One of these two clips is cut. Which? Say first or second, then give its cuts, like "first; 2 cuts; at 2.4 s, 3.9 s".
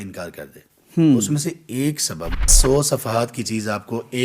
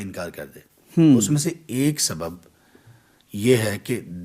first; 1 cut; at 2.6 s